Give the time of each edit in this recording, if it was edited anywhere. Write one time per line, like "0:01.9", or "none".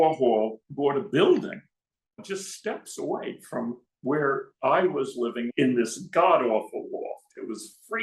0:05.5